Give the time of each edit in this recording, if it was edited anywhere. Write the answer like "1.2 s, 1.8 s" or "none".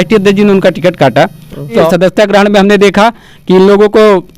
1.9 s